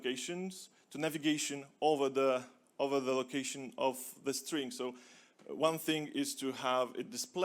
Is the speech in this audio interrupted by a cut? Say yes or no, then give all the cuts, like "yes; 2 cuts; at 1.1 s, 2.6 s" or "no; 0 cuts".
no; 0 cuts